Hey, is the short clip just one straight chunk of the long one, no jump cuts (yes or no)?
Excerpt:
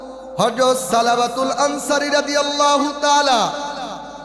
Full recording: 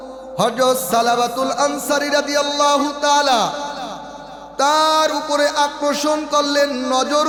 yes